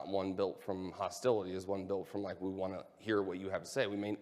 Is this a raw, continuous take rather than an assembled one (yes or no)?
yes